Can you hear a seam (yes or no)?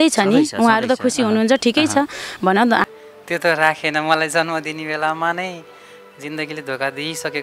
yes